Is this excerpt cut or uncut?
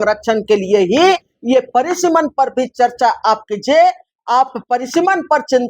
uncut